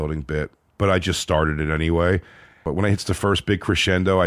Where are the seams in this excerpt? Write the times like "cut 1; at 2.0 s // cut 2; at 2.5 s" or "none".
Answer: cut 1; at 2.7 s